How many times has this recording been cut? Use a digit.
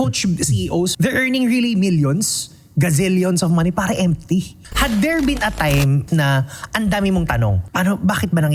4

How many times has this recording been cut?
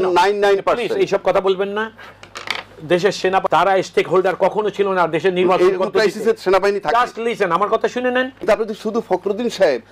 2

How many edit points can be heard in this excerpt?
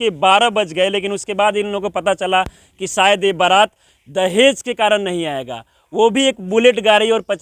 0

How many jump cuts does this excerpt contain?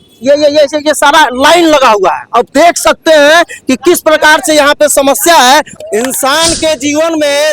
1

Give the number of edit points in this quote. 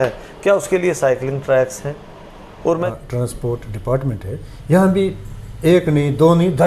1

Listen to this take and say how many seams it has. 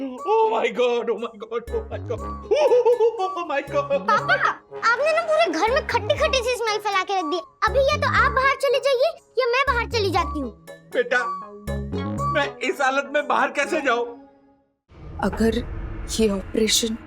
1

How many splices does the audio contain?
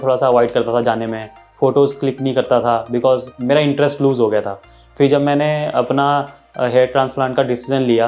1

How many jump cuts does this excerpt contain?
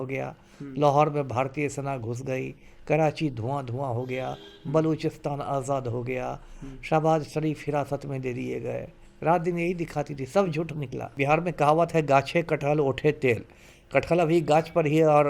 1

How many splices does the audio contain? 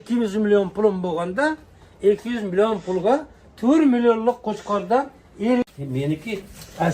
1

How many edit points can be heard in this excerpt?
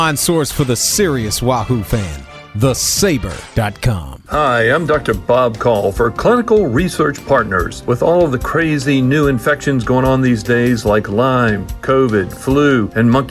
1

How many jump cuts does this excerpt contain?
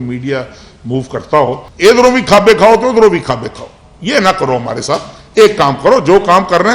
1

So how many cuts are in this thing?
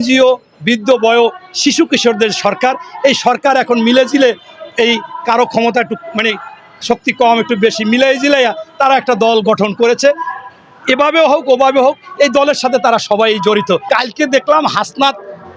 1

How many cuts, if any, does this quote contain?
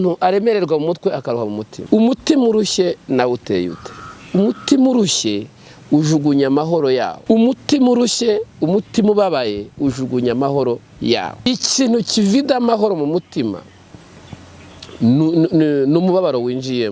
3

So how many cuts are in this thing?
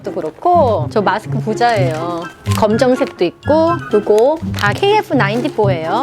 3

